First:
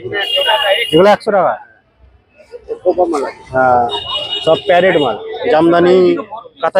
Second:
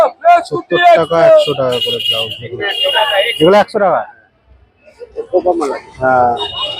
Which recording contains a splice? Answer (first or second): first